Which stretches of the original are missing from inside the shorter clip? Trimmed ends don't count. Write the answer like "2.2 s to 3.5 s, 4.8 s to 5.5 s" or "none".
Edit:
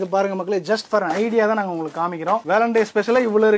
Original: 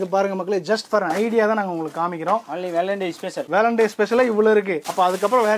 2.4 s to 3.5 s